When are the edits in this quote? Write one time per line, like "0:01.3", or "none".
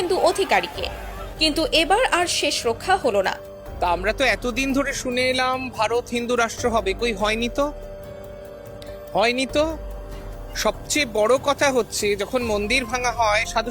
0:03.9